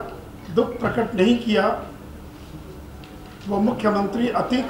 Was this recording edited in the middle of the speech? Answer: no; 0 cuts

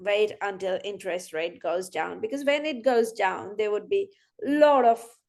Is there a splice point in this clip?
no; 0 cuts

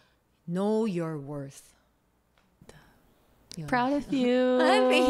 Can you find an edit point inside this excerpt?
no; 0 cuts

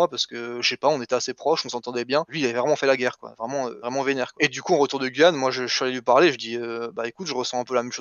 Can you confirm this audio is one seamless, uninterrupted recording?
no; 2 cuts; at 2.3 s, 4.3 s

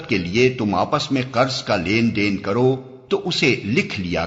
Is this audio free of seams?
no; 1 cut; at 2.9 s

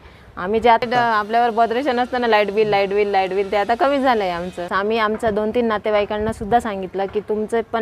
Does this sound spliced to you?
yes; 2 cuts; at 0.8 s, 4.7 s

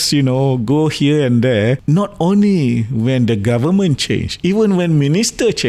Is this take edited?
yes; 1 cut; at 1.8 s

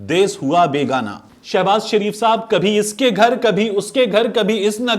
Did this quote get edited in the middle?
yes; 1 cut; at 1.2 s

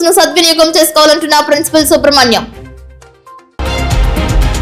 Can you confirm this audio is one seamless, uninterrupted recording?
no; 1 cut; at 3.6 s

